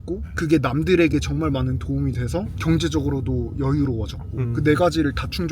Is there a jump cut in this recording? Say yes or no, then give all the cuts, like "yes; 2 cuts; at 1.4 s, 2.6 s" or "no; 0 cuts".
yes; 1 cut; at 4.4 s